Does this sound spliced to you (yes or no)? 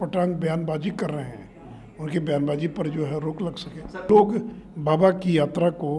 yes